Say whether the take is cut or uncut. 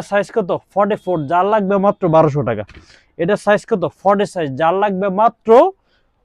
uncut